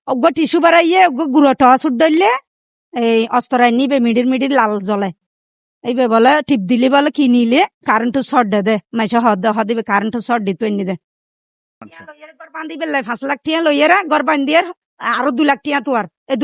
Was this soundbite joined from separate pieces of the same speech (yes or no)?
yes